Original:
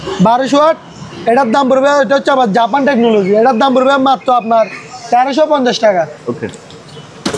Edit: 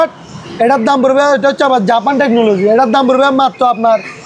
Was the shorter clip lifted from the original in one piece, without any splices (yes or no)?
yes